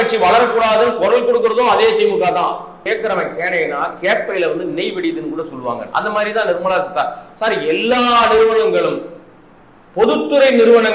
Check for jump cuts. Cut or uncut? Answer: cut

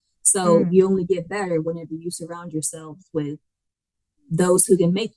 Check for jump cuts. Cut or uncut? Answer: uncut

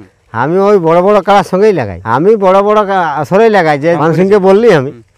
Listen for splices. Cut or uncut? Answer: cut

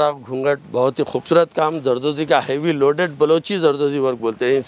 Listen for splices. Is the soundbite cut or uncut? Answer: uncut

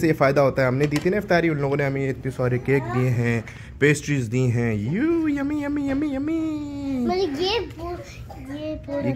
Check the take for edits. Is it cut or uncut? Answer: uncut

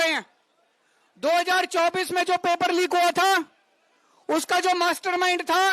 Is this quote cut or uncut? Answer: uncut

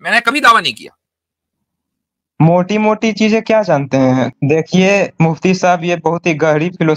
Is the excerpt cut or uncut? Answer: cut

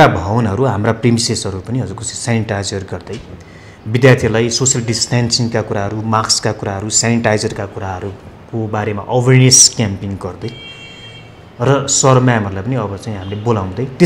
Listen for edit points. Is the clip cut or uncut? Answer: uncut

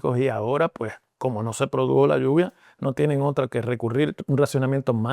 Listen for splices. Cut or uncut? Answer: cut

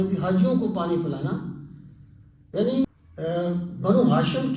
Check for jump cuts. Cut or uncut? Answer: cut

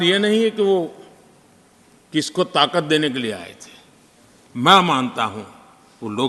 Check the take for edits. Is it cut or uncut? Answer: uncut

